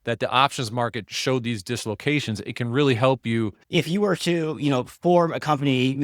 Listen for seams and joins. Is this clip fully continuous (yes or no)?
no